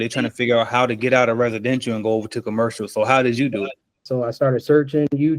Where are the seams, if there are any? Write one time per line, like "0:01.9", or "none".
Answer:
0:04.0